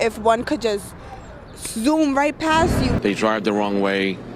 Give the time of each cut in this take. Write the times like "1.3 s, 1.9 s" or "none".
3.0 s